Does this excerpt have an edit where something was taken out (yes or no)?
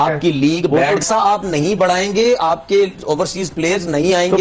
yes